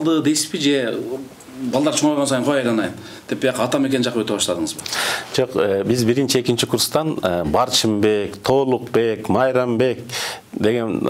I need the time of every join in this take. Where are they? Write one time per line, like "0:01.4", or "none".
none